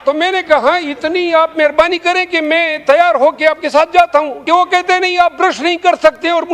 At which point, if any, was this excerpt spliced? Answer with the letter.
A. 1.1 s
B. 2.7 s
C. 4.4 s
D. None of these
C